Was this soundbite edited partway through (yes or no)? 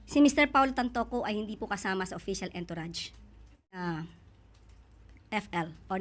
yes